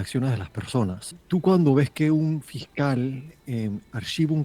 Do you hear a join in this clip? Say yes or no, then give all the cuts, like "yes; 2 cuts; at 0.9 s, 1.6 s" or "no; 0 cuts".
yes; 1 cut; at 1.1 s